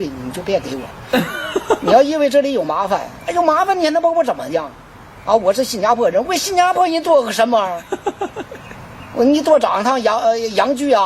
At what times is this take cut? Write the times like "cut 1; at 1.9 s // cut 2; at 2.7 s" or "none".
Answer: none